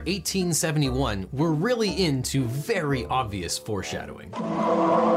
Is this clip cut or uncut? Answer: cut